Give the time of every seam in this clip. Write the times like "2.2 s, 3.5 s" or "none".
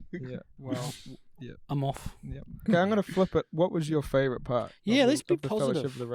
2.7 s